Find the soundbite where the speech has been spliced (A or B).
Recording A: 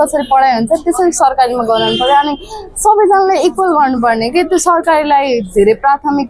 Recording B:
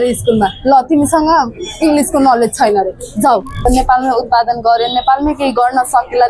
B